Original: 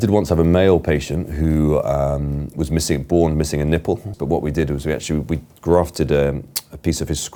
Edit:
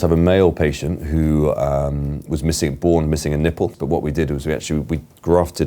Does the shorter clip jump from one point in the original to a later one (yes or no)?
yes